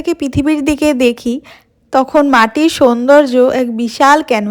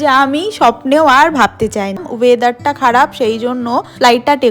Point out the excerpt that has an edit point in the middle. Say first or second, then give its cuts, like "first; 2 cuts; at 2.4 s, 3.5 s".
second; 1 cut; at 2.1 s